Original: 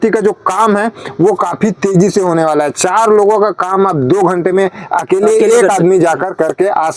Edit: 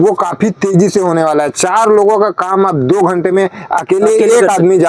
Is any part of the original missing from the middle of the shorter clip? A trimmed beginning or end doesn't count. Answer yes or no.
no